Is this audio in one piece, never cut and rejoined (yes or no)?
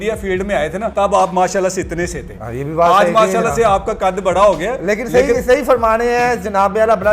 no